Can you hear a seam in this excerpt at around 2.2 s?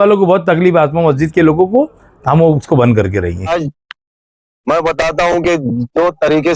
no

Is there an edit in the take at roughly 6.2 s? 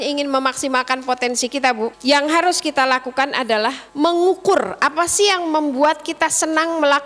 no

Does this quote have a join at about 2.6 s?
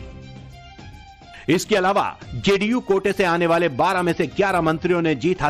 no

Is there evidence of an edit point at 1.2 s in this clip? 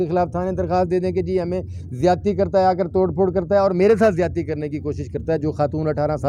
no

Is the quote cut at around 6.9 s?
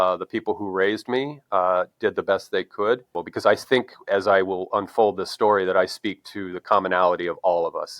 no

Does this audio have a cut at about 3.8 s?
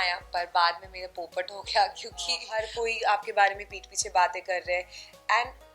no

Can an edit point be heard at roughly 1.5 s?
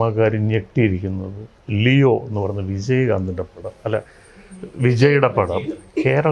no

